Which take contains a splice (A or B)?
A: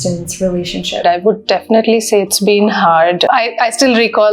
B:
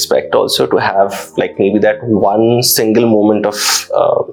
A